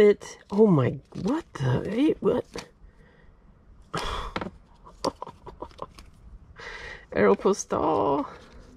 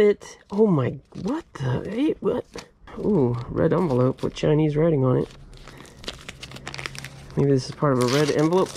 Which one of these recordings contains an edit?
second; 2 cuts; at 2.9 s, 5.7 s

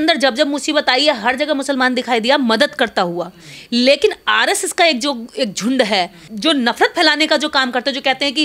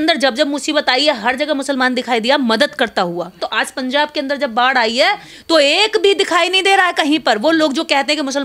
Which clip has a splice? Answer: second; 1 cut; at 3.4 s

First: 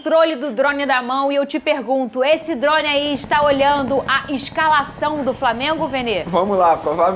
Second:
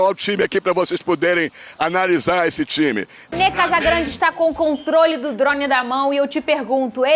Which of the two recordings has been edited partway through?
second; 1 cut; at 3.3 s

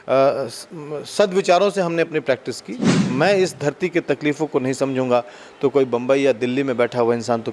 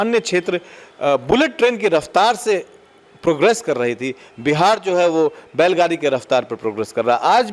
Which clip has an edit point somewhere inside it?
first; 1 cut; at 3.1 s

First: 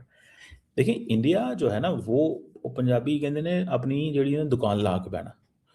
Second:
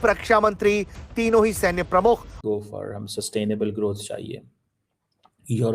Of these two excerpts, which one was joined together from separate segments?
second; 1 cut; at 2.4 s

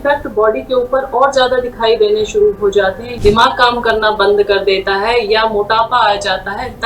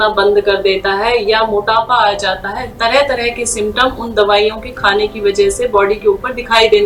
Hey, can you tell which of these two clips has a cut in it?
first; 1 cut; at 3.1 s

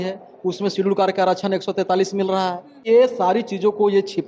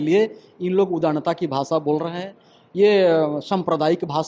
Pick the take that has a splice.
first; 1 cut; at 2.8 s

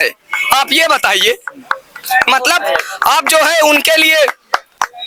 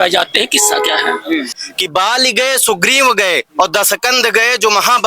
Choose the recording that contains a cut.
second; 1 cut; at 1.6 s

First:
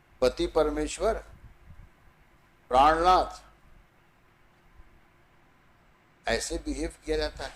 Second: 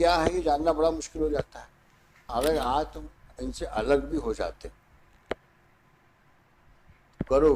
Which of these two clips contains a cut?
second; 1 cut; at 2.2 s

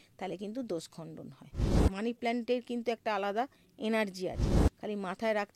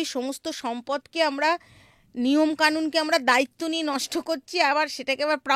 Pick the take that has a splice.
first; 2 cuts; at 1.8 s, 4.5 s

